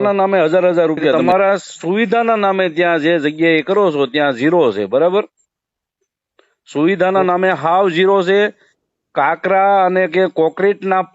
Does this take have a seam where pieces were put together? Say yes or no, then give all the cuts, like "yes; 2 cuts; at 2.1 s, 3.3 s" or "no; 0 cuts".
yes; 1 cut; at 1.1 s